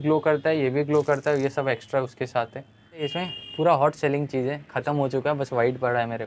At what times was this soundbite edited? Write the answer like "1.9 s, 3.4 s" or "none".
3.1 s